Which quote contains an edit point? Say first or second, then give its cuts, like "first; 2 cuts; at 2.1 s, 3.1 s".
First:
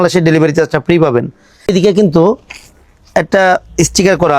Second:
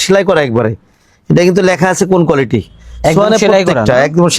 first; 1 cut; at 1.7 s